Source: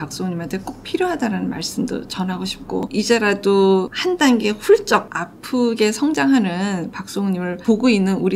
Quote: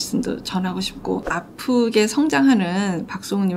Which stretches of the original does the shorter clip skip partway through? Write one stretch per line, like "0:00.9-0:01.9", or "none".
0:02.9-0:05.1